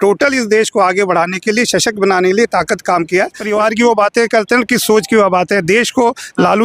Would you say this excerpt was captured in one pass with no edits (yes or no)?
no